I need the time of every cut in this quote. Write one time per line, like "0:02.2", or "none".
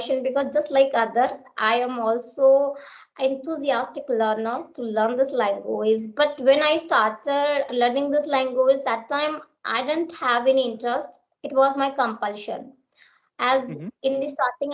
0:07.7